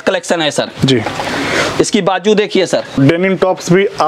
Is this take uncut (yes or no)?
no